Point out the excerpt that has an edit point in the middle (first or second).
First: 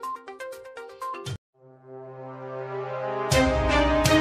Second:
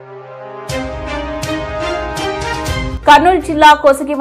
second